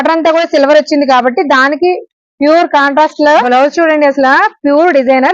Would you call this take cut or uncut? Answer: cut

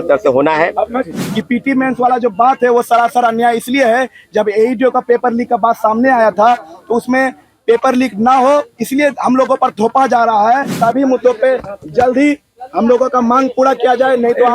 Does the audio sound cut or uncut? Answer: cut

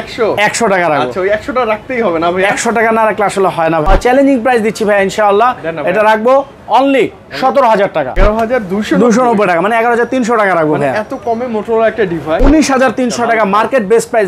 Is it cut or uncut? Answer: cut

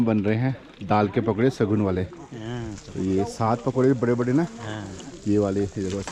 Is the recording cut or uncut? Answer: uncut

